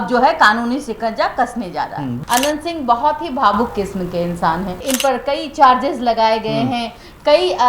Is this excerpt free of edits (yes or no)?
no